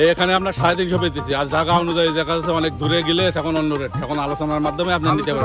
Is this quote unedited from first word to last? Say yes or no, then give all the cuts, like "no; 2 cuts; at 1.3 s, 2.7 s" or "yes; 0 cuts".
yes; 0 cuts